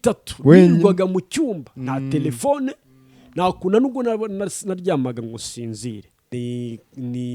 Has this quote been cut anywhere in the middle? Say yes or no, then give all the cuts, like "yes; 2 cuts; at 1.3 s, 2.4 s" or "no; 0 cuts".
yes; 1 cut; at 6.3 s